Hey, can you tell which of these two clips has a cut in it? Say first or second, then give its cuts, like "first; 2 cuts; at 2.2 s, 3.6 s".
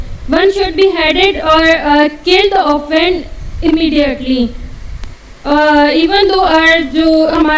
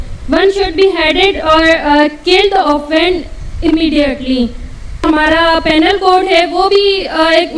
second; 1 cut; at 5.0 s